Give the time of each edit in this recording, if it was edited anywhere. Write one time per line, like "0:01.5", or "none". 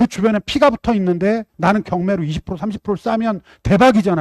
0:01.5